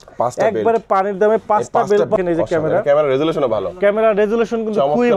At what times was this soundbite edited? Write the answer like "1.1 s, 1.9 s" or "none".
2.2 s